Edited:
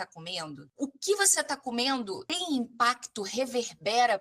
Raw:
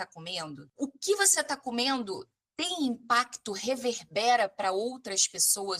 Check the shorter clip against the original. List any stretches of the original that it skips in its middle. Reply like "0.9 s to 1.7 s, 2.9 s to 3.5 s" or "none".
2.3 s to 2.6 s